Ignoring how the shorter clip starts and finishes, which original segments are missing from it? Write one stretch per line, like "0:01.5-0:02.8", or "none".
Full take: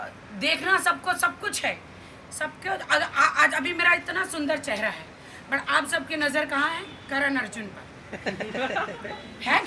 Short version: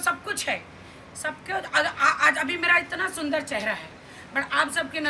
none